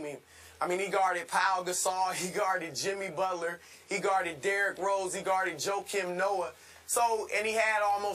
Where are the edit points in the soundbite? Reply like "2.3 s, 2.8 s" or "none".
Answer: 4.0 s